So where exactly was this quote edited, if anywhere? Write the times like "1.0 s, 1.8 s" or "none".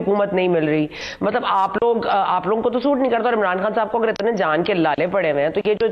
1.0 s

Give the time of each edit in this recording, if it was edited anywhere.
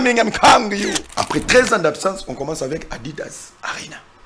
1.1 s

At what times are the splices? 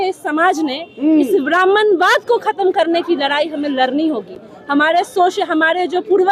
none

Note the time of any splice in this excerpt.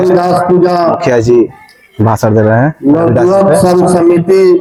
none

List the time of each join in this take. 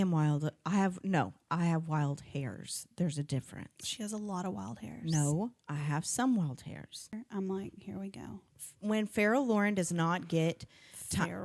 7.2 s

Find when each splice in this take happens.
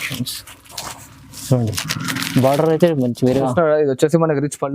3.5 s

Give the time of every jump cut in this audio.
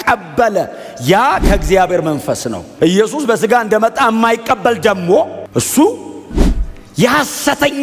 2.7 s, 5.4 s

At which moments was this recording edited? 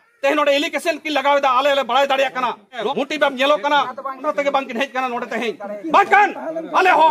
none

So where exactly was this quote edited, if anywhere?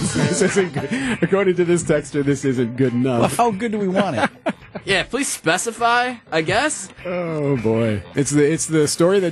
8.1 s

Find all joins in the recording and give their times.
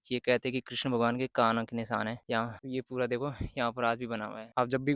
none

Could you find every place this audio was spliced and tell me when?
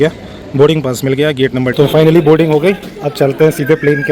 1.7 s

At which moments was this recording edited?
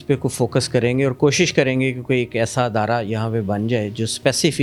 none

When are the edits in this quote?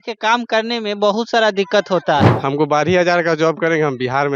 2.3 s

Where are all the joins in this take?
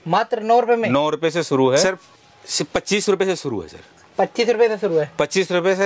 1.8 s

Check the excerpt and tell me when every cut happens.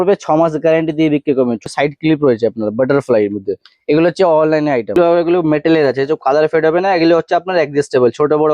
1.7 s, 5.0 s

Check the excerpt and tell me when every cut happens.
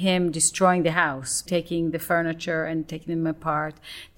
1.4 s

